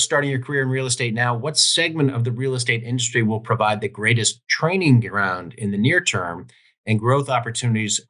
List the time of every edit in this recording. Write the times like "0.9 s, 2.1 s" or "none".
none